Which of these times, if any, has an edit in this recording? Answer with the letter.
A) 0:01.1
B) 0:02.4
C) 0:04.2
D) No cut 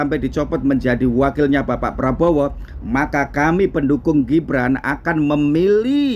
D